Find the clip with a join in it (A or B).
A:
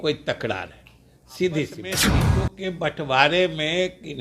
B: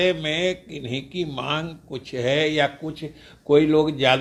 A